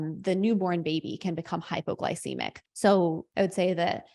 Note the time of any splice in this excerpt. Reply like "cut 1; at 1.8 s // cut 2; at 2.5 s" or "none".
cut 1; at 2.6 s // cut 2; at 3.2 s

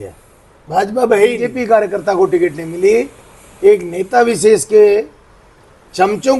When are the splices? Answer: cut 1; at 1.6 s

